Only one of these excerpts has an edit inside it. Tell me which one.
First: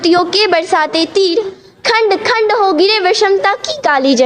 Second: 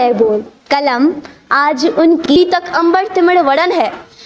second; 1 cut; at 2.2 s

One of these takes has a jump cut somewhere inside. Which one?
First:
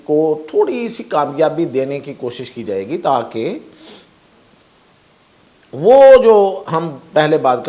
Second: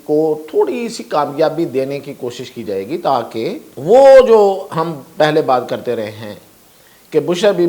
second; 1 cut; at 3.7 s

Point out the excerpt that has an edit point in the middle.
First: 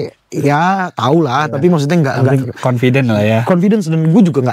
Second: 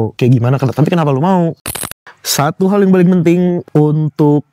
second; 2 cuts; at 1.8 s, 3.6 s

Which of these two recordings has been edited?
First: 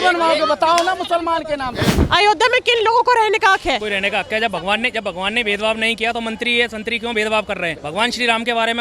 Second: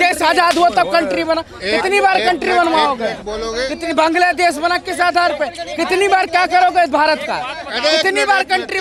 first; 3 cuts; at 1.9 s, 3.8 s, 7.8 s

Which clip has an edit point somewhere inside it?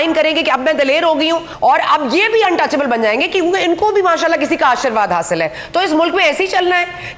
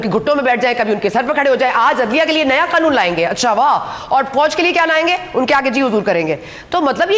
first; 1 cut; at 1.5 s

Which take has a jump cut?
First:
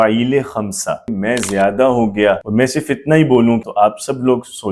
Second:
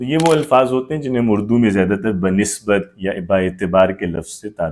first; 3 cuts; at 1.1 s, 2.4 s, 3.6 s

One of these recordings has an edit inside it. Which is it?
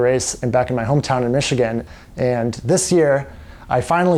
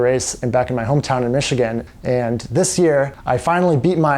second; 2 cuts; at 1.9 s, 3.2 s

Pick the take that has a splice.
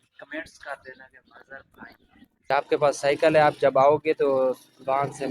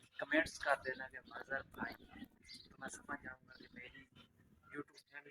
first; 1 cut; at 2.5 s

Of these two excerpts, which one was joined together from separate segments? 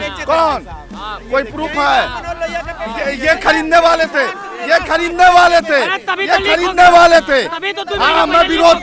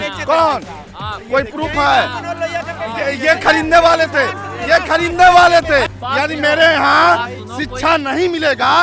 second; 1 cut; at 6.0 s

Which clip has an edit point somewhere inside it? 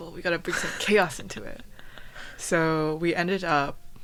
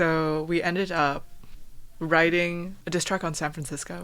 second; 1 cut; at 2.8 s

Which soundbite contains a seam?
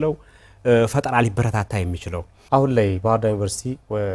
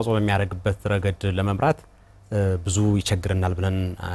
first; 1 cut; at 2.4 s

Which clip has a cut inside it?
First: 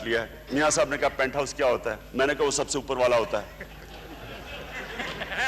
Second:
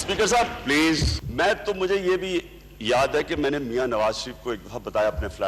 second; 1 cut; at 1.2 s

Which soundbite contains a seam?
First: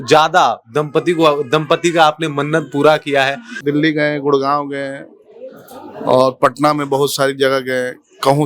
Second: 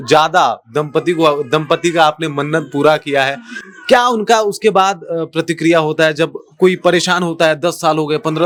first; 1 cut; at 3.5 s

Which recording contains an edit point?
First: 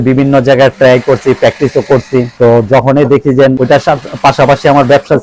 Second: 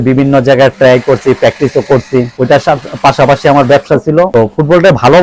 second; 1 cut; at 2.4 s

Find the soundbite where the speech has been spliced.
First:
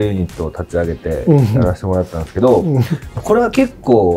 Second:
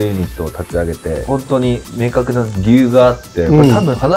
second; 1 cut; at 1.2 s

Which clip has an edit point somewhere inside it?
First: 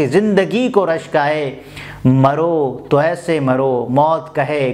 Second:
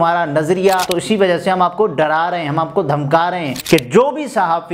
second; 2 cuts; at 0.9 s, 3.5 s

